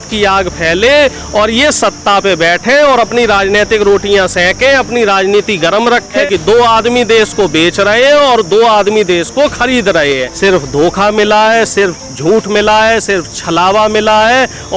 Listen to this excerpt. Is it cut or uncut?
cut